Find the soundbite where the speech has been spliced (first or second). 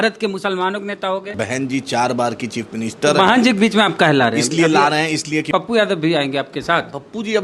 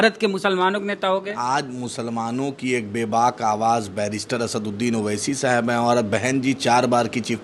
first